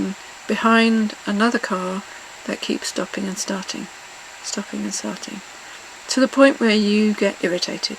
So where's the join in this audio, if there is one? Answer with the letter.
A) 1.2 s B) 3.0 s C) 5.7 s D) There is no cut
D